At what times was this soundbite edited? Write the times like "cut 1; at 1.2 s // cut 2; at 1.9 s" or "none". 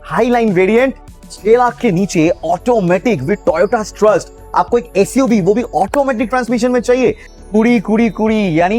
cut 1; at 1.1 s // cut 2; at 7.3 s